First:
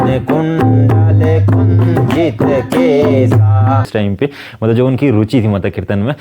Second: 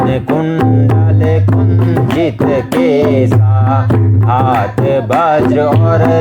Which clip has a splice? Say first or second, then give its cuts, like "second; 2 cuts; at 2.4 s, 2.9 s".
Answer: first; 1 cut; at 3.9 s